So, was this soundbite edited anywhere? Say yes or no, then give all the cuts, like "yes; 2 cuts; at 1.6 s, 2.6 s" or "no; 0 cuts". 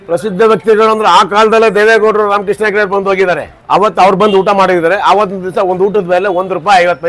no; 0 cuts